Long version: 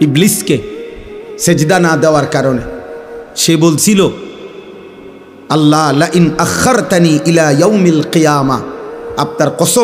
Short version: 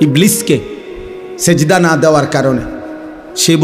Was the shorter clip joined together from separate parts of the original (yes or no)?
no